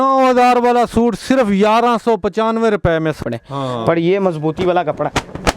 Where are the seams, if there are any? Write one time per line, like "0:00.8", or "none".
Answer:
0:03.2